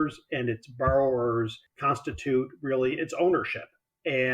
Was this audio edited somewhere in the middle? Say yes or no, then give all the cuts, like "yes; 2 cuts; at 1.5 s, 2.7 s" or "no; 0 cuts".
yes; 1 cut; at 1.7 s